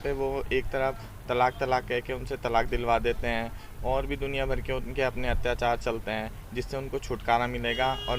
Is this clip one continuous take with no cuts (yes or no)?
yes